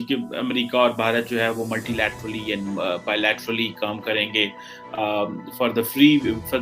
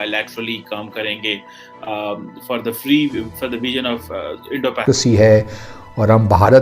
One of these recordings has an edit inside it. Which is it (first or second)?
second